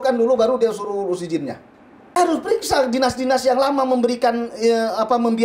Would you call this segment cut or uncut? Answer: cut